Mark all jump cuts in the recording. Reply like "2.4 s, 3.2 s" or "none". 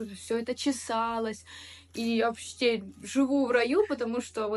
none